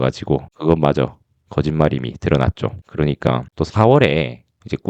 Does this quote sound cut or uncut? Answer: cut